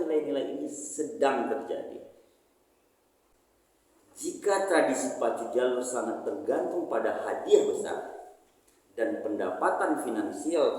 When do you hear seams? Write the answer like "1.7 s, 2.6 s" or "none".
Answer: 3.3 s